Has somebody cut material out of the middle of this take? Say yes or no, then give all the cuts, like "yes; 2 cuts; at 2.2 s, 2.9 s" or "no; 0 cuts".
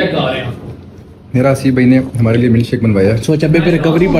no; 0 cuts